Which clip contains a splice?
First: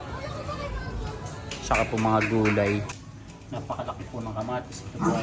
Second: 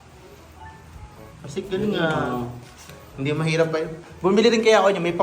first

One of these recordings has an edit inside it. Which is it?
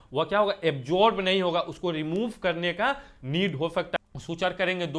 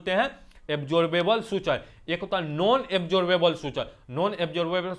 first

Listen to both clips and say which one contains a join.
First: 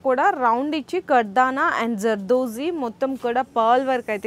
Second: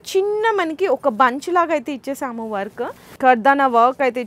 second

